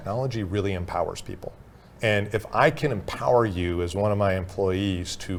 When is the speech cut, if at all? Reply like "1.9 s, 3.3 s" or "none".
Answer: none